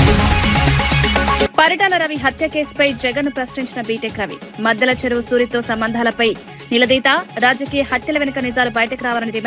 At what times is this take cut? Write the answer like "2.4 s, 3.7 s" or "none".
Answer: 1.5 s